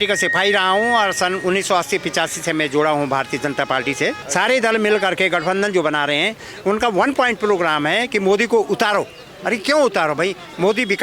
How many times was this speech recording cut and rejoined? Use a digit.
1